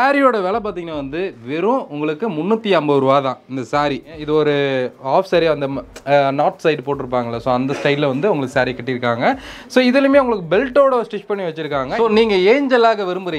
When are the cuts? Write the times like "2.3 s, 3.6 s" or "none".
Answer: 4.1 s, 11.9 s